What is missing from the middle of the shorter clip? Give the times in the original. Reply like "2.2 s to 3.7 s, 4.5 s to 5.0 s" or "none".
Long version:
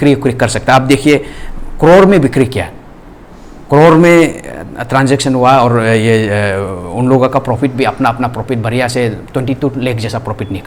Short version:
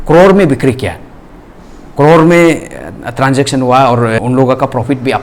5.9 s to 6.9 s